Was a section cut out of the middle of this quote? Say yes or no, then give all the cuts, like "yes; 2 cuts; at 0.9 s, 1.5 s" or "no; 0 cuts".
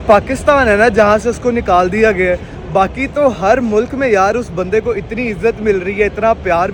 no; 0 cuts